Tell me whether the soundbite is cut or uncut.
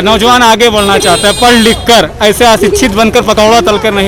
uncut